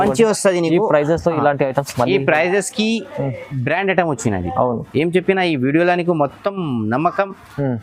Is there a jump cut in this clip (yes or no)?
no